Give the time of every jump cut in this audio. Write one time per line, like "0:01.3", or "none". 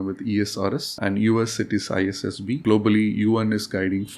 0:00.9
0:02.6